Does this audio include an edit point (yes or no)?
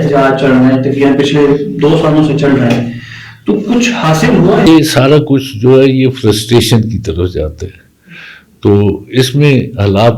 yes